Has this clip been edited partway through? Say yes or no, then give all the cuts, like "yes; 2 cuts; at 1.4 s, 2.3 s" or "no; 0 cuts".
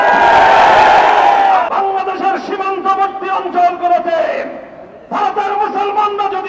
yes; 1 cut; at 1.7 s